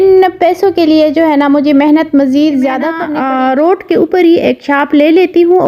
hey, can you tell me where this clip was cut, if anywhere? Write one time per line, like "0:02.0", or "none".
0:03.0